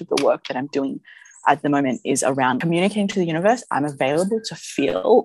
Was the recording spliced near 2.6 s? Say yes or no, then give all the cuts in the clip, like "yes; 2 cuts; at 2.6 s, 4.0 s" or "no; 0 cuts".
yes; 1 cut; at 2.6 s